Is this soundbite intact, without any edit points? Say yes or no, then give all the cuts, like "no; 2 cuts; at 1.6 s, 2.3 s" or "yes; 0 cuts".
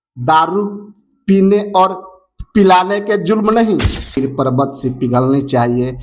no; 1 cut; at 4.2 s